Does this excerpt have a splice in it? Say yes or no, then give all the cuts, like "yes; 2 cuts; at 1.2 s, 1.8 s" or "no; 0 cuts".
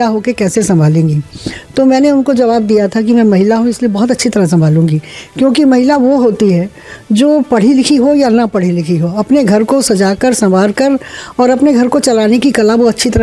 no; 0 cuts